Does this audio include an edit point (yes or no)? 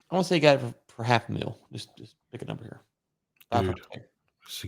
no